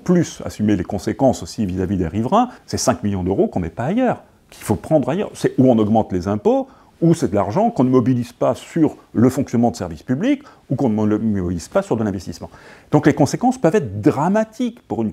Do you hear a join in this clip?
yes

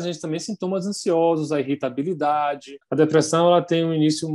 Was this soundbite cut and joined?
yes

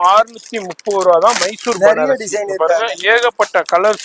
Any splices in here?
no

